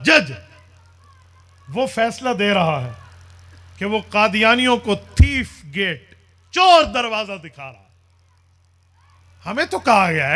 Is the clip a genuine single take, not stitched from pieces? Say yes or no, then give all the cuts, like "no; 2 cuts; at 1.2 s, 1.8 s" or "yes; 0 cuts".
yes; 0 cuts